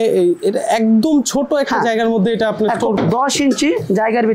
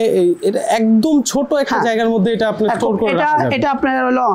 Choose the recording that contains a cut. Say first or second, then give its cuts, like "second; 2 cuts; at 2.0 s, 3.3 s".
first; 1 cut; at 3.0 s